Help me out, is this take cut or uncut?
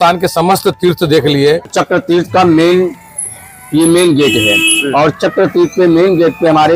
cut